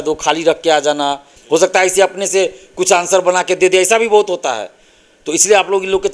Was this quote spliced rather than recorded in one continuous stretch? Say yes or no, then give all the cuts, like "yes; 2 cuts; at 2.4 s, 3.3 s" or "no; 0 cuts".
yes; 1 cut; at 1.3 s